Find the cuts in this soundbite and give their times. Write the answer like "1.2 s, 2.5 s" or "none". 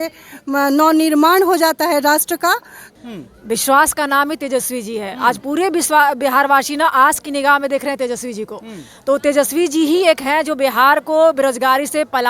2.8 s